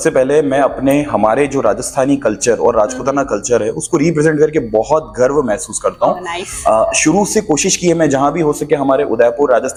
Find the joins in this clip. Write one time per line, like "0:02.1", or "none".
none